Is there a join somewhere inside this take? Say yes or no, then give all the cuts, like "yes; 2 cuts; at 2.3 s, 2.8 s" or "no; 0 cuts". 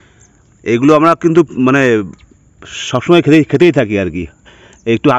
no; 0 cuts